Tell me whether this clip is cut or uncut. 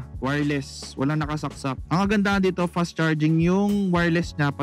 cut